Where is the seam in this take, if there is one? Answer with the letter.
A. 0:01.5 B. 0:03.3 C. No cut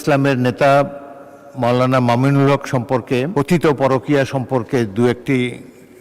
B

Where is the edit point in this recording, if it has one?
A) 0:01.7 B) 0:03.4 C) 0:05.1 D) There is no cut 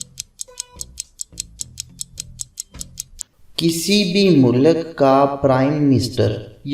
B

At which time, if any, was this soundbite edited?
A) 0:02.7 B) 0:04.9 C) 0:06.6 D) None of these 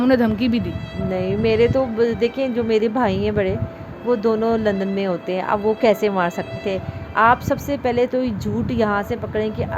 C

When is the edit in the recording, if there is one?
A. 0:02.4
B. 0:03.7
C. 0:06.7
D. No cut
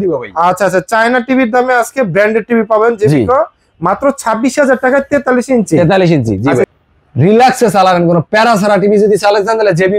C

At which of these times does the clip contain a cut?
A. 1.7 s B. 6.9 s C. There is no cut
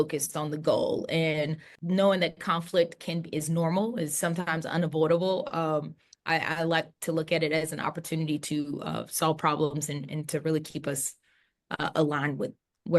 A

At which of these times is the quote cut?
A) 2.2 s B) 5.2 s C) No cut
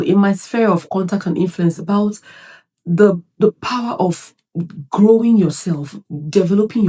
C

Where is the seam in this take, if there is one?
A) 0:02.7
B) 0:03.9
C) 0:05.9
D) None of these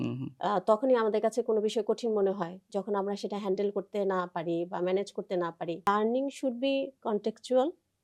C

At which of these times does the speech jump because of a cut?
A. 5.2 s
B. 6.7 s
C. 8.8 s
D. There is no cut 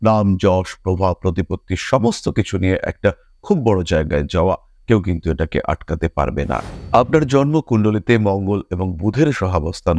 B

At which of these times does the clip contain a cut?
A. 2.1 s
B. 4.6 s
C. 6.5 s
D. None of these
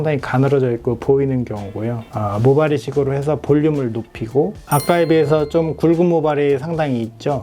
B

